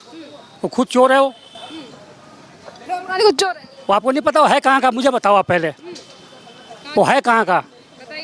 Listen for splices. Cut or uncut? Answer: uncut